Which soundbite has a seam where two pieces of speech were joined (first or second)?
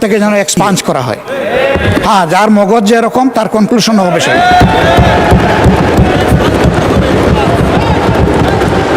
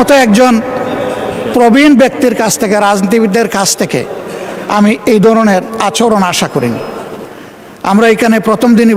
first